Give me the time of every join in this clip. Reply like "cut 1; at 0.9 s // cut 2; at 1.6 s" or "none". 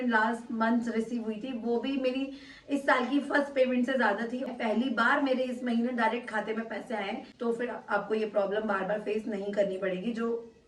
cut 1; at 4.5 s // cut 2; at 7.2 s